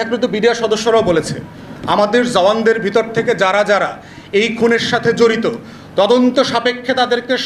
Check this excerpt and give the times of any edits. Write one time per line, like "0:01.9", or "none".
none

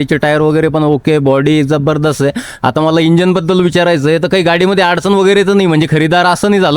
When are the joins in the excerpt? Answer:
none

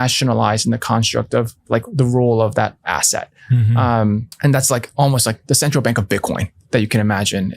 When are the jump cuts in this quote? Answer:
0:04.3

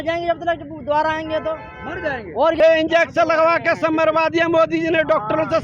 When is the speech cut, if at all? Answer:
0:02.6

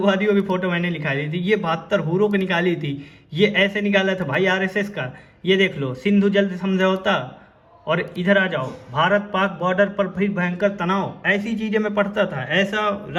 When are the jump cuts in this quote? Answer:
none

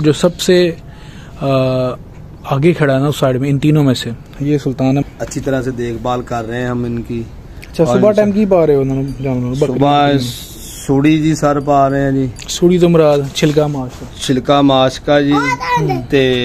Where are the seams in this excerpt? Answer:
0:05.0

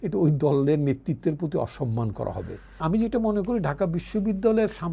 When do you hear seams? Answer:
0:02.8

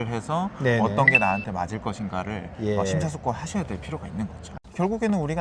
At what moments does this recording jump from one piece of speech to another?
0:04.4

